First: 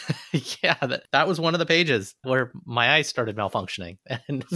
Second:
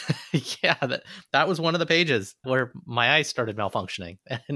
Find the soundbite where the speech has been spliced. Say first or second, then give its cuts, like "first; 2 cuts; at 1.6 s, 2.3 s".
first; 1 cut; at 1.0 s